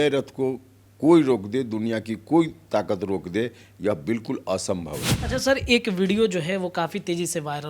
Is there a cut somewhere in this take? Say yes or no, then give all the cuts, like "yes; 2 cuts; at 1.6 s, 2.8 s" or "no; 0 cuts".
yes; 1 cut; at 5.1 s